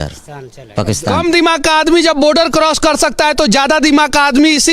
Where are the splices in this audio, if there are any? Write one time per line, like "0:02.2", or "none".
0:01.1

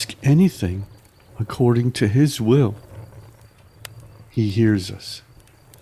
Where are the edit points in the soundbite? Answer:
0:02.8
0:04.3
0:05.1

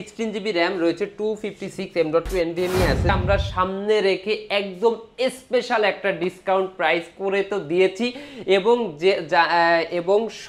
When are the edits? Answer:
0:03.1

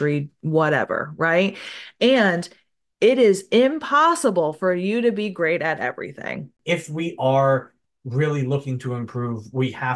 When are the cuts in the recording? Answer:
0:06.5

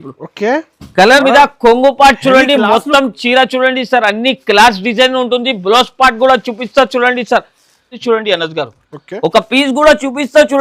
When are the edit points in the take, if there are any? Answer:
0:01.2
0:07.9

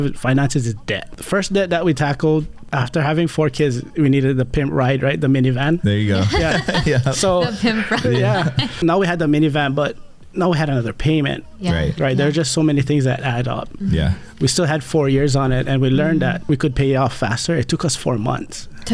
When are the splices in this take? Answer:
0:01.1
0:02.7
0:08.7
0:16.4

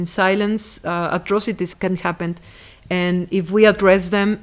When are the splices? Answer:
0:01.7

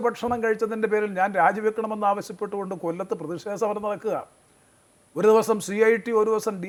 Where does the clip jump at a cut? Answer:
none

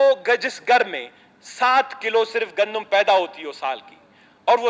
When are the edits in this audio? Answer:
none

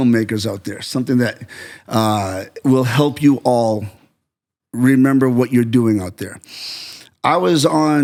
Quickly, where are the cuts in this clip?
none

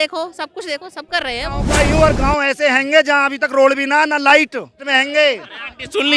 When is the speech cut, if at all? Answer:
0:01.6
0:04.8

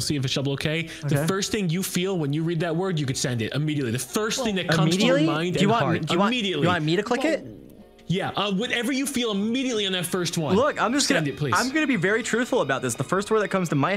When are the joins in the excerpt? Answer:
none

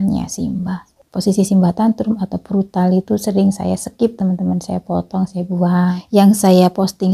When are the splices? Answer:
0:01.2
0:06.0

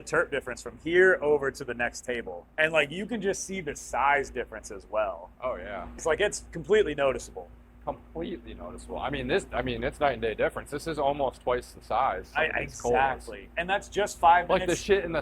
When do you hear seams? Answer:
0:02.4

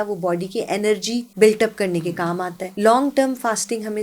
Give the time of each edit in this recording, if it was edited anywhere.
0:01.3
0:02.6

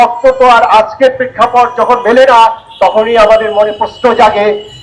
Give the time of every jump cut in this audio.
none

